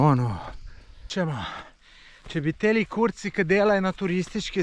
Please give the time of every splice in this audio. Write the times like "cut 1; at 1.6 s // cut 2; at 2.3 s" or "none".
cut 1; at 1.0 s